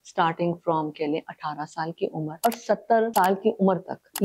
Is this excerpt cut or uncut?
uncut